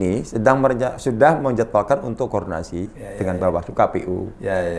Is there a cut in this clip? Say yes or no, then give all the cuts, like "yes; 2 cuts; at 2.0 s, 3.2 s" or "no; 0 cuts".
no; 0 cuts